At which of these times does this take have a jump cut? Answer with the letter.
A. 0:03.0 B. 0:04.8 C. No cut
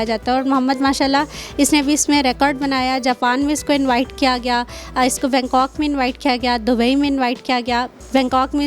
C